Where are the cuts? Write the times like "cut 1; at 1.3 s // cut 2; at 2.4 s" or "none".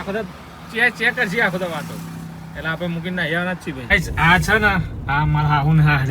cut 1; at 3.8 s